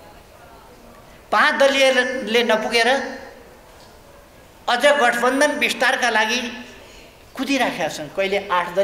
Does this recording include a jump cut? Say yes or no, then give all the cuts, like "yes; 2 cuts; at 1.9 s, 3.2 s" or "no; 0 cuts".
no; 0 cuts